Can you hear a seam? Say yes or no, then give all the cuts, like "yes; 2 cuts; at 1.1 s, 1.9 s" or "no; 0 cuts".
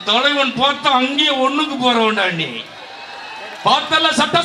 no; 0 cuts